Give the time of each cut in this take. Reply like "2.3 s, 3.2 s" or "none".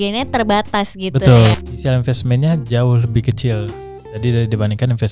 1.6 s